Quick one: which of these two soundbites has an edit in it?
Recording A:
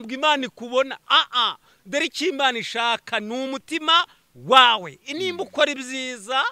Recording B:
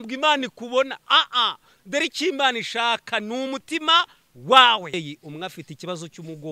B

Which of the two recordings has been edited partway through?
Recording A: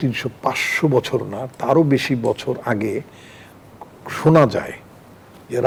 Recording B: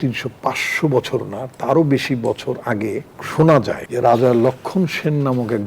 B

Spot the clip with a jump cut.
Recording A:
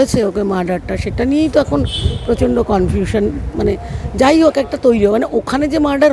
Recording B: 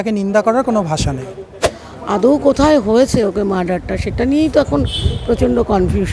B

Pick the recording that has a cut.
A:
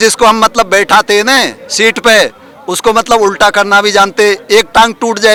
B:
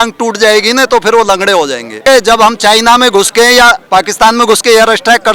B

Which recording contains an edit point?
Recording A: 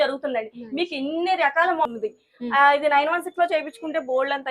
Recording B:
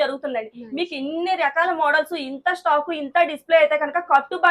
A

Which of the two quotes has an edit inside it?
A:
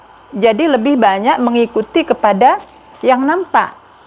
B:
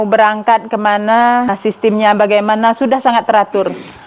B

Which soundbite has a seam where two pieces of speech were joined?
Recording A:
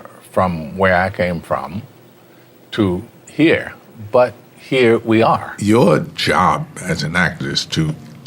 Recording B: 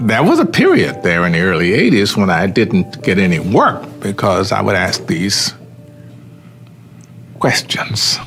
A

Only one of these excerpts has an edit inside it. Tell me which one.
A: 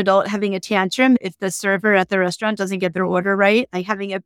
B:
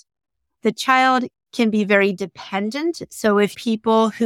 A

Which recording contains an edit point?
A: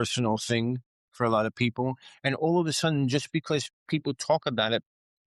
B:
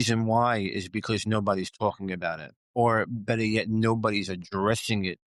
B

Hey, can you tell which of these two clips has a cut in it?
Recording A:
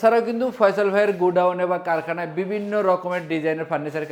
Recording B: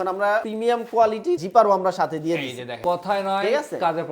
B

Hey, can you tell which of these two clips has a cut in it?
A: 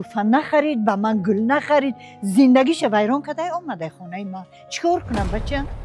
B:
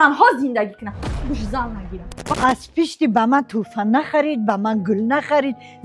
B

